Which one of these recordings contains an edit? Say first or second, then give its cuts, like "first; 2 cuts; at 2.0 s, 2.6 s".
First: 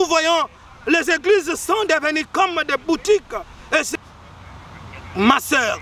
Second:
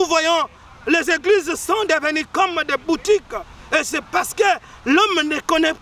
first; 1 cut; at 4.0 s